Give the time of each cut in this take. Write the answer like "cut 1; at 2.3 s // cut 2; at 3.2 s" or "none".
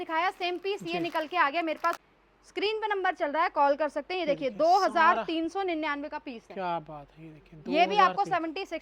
cut 1; at 2.0 s

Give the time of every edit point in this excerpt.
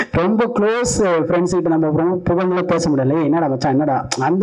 none

